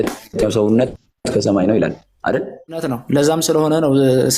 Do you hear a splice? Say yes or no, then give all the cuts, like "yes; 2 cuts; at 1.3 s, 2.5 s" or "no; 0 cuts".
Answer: yes; 1 cut; at 3.0 s